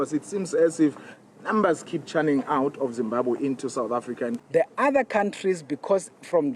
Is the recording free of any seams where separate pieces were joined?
no; 1 cut; at 4.4 s

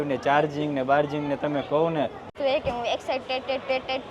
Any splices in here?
yes; 1 cut; at 2.3 s

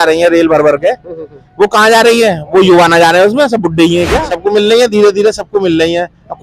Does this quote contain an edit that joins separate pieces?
yes; 1 cut; at 4.3 s

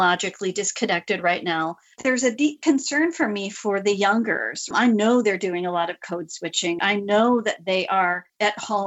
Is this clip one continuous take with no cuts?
no; 2 cuts; at 2.0 s, 6.8 s

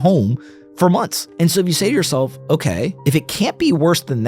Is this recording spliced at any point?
yes; 2 cuts; at 1.2 s, 3.0 s

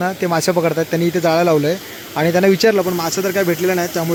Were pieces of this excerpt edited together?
no; 0 cuts

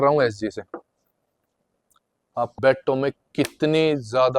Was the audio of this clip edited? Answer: yes; 1 cut; at 2.5 s

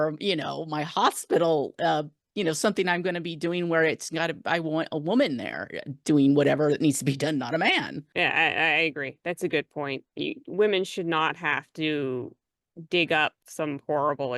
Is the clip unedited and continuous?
no; 2 cuts; at 8.0 s, 13.4 s

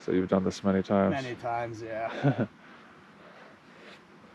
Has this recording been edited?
no; 0 cuts

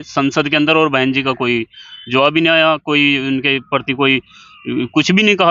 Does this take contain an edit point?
no; 0 cuts

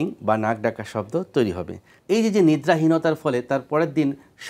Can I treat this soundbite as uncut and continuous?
no; 1 cut; at 1.9 s

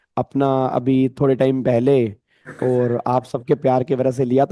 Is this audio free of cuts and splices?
yes; 0 cuts

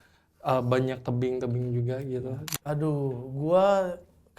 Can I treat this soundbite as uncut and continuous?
no; 1 cut; at 2.4 s

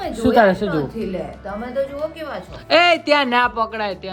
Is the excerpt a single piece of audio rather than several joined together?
yes; 0 cuts

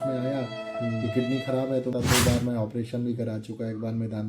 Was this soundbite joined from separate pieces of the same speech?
yes; 1 cut; at 1.9 s

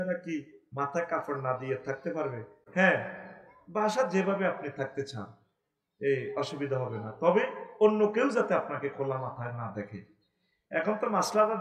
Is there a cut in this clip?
no; 0 cuts

